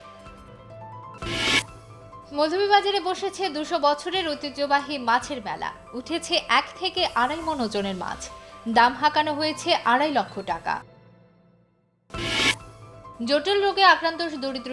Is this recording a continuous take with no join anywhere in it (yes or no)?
no